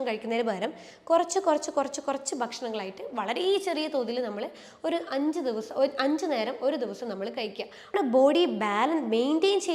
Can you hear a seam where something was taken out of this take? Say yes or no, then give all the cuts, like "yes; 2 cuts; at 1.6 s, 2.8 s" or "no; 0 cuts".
yes; 1 cut; at 7.9 s